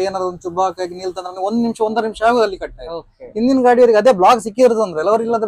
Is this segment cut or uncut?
uncut